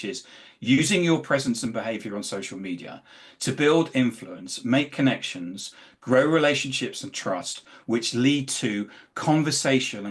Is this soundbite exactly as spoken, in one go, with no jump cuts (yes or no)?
yes